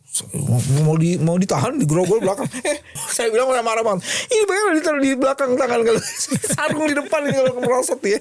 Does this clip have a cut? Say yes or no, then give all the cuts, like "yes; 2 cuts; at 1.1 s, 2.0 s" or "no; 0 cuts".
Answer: yes; 1 cut; at 3.1 s